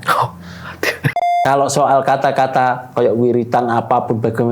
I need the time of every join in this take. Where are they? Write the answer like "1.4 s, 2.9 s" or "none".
1.2 s